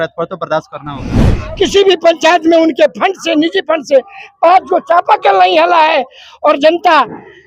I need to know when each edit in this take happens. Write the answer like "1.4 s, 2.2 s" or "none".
1.2 s